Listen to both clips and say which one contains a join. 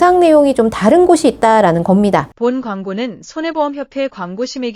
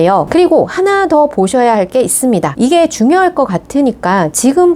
first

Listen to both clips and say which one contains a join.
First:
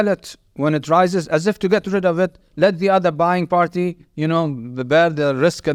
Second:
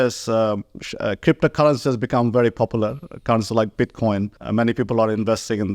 second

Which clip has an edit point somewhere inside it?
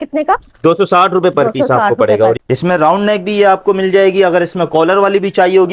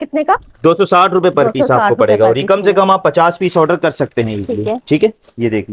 first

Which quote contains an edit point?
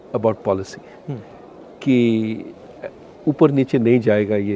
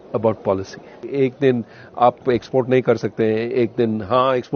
second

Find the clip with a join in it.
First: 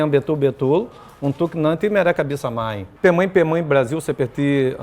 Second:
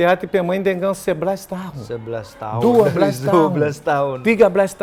first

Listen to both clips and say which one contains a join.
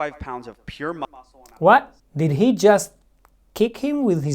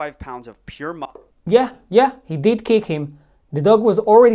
first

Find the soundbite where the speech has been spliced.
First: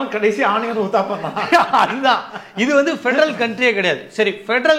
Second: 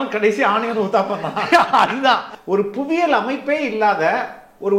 second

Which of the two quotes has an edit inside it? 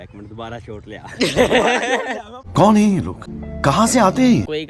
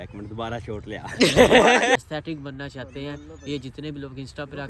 second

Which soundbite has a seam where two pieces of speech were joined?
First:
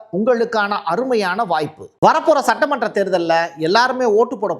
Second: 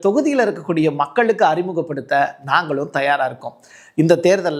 first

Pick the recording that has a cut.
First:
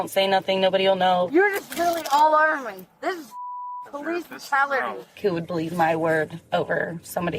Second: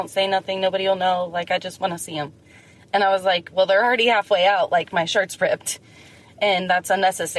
first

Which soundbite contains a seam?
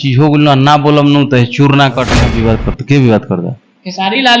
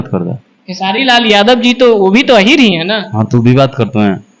first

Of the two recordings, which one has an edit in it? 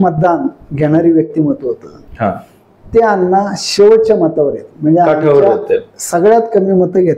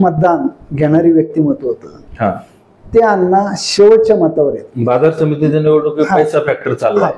second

